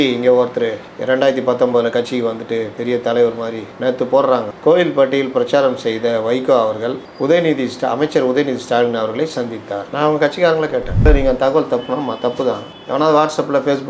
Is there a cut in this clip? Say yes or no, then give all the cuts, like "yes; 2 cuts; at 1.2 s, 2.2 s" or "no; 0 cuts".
yes; 1 cut; at 10.9 s